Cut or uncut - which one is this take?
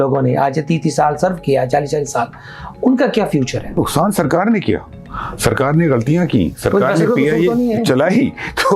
cut